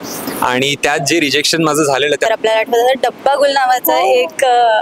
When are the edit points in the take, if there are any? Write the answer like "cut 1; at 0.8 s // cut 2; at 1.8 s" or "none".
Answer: cut 1; at 2.3 s